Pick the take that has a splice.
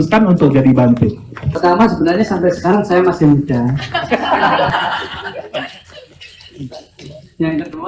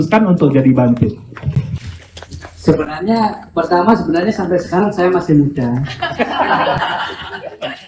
first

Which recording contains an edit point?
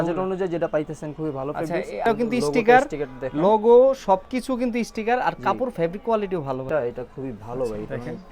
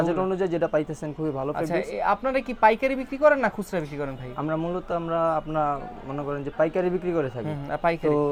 first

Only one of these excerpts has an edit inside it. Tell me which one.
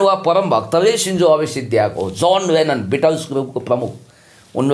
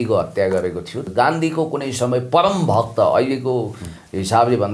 second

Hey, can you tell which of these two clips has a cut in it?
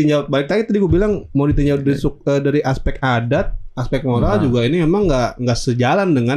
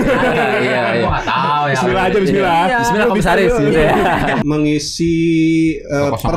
second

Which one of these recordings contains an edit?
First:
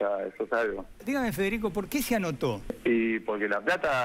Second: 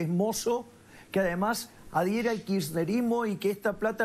first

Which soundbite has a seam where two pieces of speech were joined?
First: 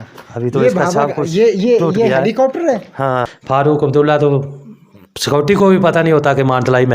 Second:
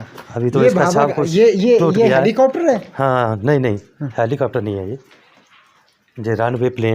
first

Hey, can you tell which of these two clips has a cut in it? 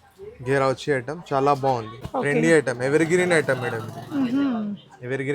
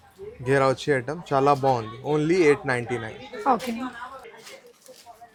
first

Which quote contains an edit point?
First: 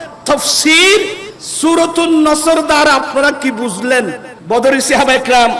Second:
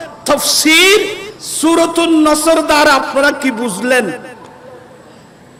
first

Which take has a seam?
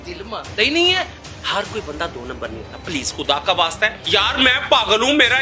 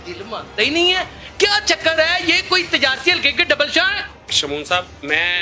first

